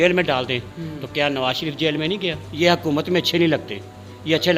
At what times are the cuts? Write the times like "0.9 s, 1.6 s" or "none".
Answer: 2.4 s

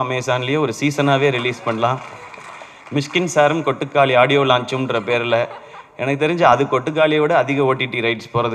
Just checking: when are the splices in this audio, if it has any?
none

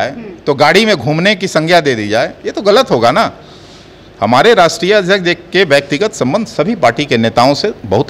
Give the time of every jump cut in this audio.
none

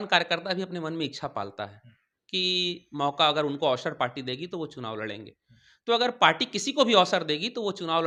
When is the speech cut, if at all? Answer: none

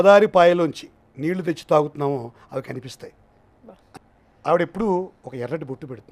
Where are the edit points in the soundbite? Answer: 4.0 s

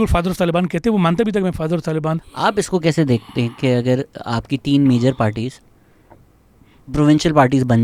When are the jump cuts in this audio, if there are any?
2.2 s

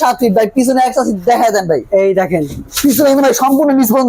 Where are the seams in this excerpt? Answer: none

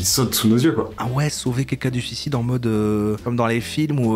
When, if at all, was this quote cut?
1.0 s

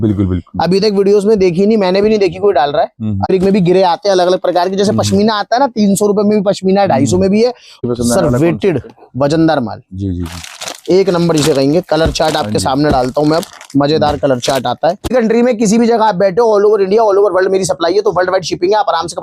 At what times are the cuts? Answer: 3.3 s, 7.8 s, 15.1 s

